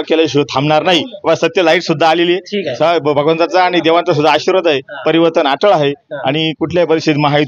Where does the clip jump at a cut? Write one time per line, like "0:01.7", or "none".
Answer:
none